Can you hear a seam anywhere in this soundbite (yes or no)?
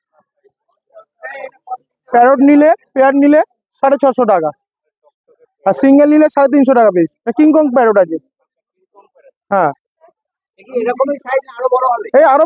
no